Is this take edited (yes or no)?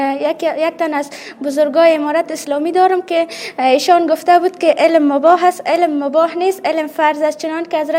no